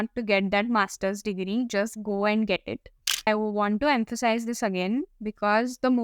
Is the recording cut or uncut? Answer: cut